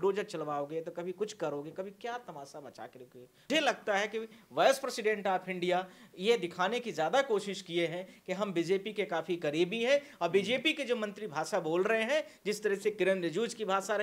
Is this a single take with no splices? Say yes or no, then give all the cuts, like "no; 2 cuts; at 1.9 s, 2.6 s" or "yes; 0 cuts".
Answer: no; 1 cut; at 3.5 s